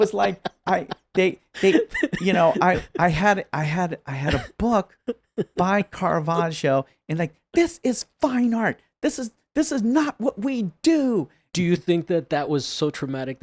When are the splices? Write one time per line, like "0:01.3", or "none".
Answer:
0:11.5